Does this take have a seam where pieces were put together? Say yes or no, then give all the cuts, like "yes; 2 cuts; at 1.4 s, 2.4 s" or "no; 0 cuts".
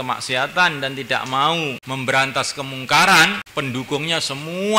yes; 2 cuts; at 1.8 s, 3.4 s